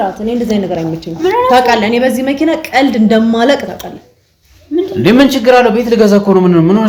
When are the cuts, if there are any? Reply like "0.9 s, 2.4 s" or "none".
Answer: none